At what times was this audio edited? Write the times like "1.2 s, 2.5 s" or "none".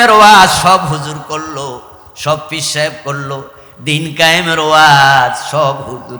none